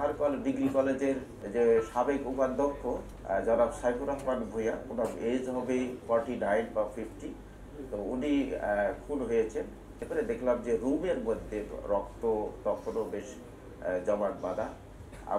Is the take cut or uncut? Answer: cut